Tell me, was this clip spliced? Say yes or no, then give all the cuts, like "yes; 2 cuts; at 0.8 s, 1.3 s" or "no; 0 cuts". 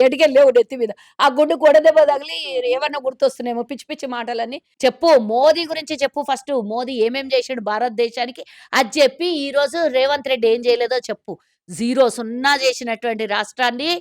yes; 1 cut; at 4.6 s